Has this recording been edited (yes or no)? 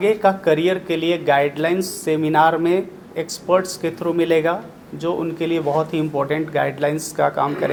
no